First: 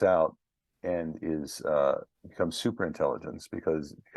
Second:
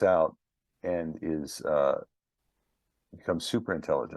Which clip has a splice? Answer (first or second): first